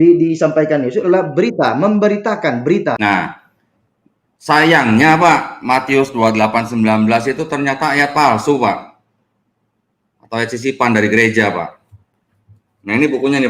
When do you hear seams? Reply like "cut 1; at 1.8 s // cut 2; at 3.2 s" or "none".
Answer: cut 1; at 3.0 s